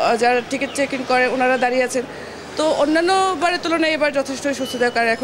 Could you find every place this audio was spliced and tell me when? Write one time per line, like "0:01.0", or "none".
none